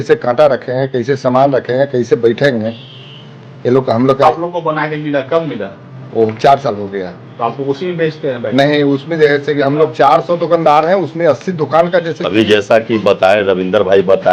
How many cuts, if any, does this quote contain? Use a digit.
1